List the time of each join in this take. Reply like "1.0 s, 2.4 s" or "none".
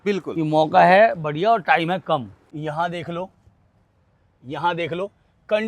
2.4 s